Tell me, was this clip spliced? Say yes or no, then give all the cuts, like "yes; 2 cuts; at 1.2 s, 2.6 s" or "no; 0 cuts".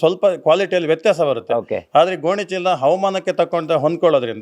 no; 0 cuts